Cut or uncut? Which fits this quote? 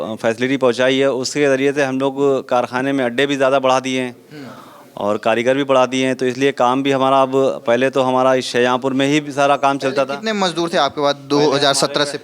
uncut